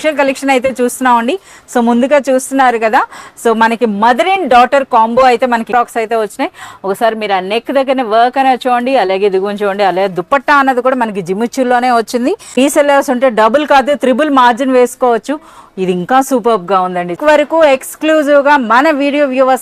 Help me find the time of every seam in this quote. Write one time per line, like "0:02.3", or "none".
0:05.7
0:12.6
0:17.2